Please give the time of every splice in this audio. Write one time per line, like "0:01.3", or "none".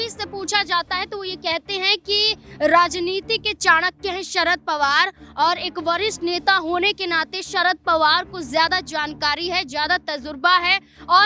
none